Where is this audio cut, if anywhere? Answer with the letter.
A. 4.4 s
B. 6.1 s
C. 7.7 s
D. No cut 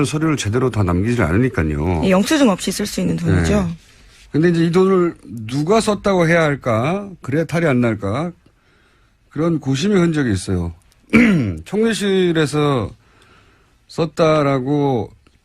C